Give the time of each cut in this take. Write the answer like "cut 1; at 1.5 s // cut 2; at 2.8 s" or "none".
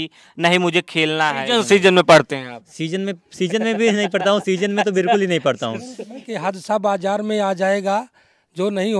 cut 1; at 1.4 s // cut 2; at 6.3 s